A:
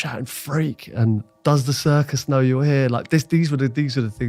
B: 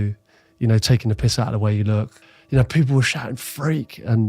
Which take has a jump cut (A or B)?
B